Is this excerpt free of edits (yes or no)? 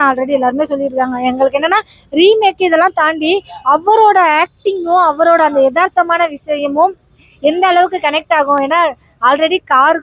yes